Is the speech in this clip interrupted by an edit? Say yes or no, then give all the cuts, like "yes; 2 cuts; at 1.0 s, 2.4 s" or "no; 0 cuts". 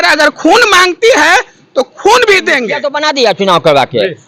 yes; 1 cut; at 2.9 s